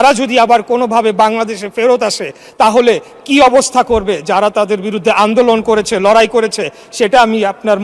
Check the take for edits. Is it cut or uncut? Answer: uncut